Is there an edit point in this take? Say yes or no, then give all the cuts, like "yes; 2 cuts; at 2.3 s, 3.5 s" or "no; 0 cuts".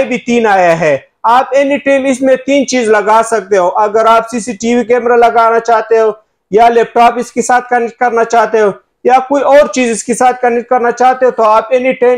no; 0 cuts